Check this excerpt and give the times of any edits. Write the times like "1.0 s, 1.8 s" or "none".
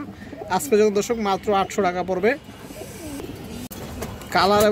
3.7 s